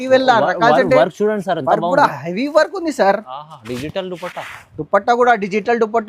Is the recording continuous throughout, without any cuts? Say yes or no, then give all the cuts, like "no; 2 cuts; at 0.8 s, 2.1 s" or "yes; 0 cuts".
yes; 0 cuts